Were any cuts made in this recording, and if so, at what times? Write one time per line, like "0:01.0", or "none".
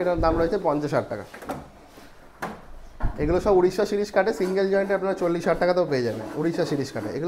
none